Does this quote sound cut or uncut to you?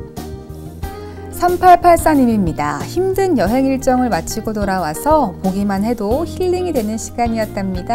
cut